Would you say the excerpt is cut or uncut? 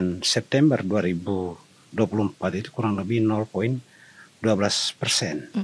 uncut